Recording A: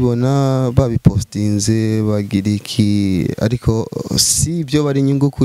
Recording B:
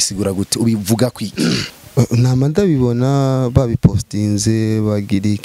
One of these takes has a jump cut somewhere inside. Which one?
B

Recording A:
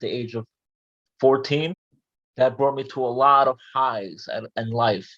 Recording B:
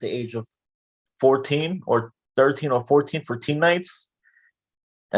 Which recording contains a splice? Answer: A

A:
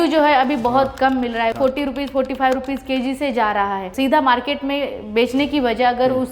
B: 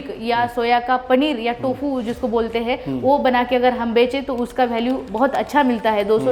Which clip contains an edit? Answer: A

